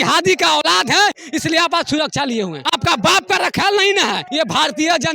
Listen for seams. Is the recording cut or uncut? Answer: cut